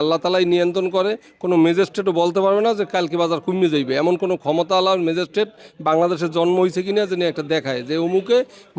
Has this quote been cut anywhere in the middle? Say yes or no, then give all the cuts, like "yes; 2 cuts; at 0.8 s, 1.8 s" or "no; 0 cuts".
no; 0 cuts